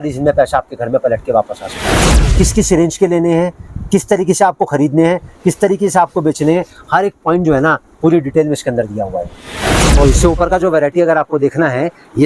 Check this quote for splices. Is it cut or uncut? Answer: cut